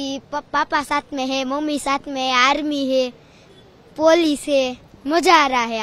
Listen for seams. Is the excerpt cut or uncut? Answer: cut